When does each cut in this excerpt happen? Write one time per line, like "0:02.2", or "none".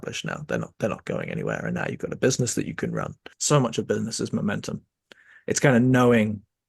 0:03.3